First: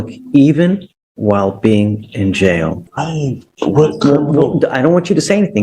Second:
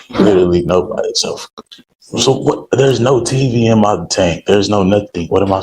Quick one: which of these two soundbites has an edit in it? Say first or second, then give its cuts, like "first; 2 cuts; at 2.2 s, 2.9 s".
first; 1 cut; at 2.8 s